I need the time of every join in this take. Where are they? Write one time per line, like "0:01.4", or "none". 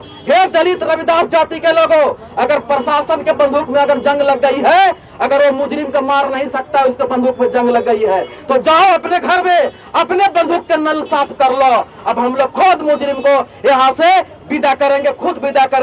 none